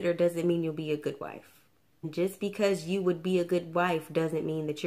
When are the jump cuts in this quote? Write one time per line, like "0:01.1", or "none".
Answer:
0:02.1